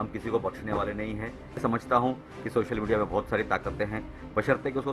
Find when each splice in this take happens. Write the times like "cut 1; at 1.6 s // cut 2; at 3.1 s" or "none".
cut 1; at 1.6 s